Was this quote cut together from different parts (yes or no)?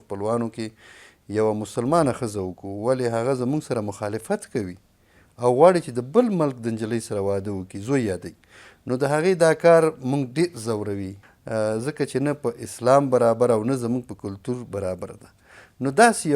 no